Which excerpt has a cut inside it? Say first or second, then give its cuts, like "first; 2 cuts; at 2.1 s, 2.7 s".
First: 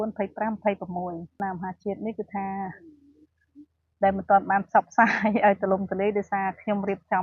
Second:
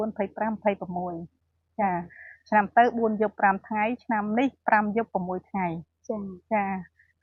first; 1 cut; at 1.3 s